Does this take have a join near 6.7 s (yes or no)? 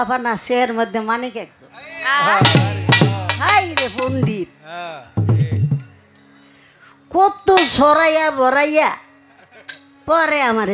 no